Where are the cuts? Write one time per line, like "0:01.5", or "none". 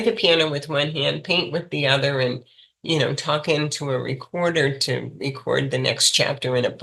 none